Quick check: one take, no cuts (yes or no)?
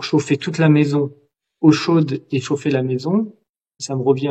yes